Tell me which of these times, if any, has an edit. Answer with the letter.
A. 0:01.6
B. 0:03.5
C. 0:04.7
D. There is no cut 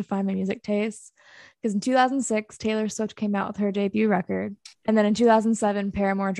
C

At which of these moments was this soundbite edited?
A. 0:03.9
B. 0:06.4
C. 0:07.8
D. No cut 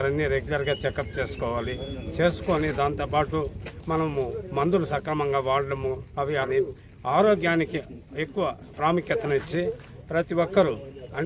B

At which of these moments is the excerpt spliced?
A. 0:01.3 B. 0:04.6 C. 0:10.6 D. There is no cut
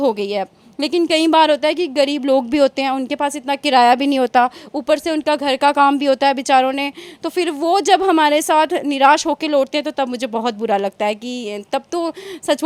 D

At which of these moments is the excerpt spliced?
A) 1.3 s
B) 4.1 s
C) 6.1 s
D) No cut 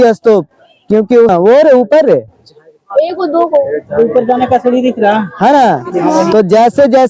A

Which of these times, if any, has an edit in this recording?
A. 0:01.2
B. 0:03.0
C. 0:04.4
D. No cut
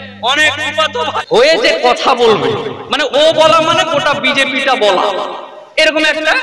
A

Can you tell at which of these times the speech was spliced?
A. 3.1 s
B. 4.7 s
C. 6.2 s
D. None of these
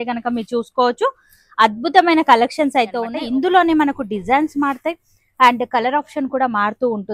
A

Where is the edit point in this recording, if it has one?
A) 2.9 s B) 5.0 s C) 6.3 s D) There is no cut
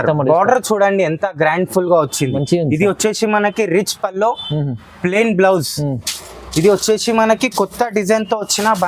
D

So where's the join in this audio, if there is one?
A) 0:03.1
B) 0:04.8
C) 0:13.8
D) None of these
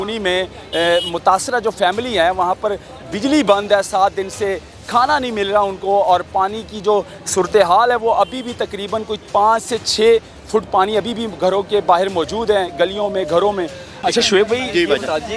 C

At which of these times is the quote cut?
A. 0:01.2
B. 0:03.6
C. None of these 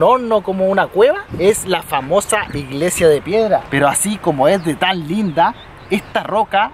B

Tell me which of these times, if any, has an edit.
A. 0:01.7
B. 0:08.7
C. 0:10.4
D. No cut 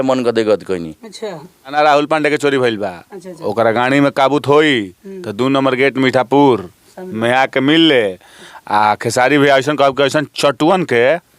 A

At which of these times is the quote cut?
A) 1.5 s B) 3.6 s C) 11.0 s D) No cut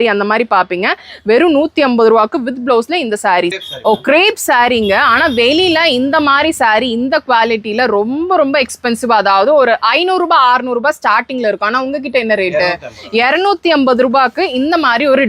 B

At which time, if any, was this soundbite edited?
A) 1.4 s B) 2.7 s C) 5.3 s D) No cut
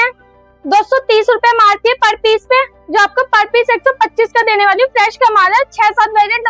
D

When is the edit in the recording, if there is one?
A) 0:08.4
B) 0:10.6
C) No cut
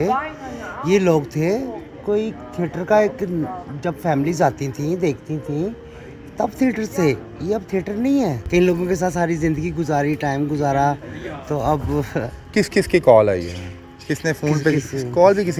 A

